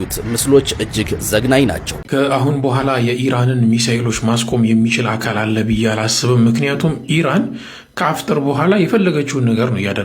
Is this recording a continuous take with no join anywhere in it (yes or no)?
no